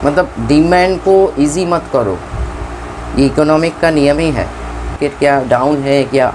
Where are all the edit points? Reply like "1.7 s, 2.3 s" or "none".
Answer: 4.9 s